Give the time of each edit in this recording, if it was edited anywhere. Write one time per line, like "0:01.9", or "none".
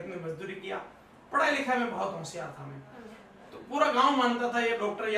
none